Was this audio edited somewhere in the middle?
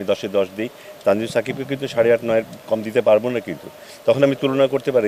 no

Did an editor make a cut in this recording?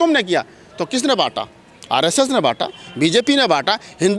no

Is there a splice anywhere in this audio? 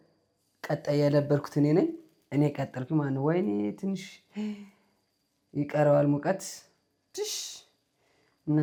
no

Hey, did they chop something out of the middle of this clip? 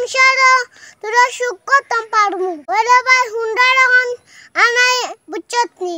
yes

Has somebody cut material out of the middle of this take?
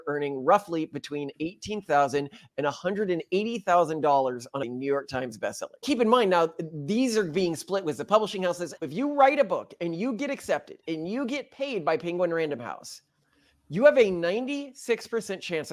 yes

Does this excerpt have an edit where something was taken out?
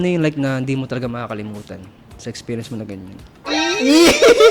yes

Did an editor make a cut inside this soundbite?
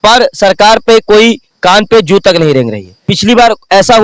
yes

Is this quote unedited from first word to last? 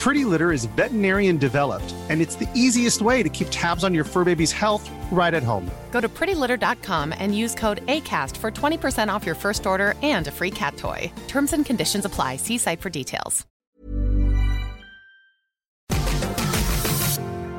no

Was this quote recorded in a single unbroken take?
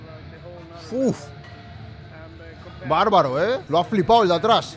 no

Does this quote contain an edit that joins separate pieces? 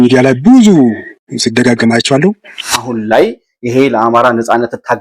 yes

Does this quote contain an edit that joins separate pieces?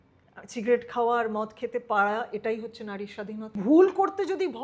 yes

